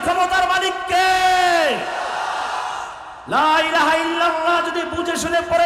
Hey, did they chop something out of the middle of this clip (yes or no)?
no